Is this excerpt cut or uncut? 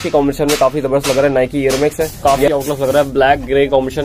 cut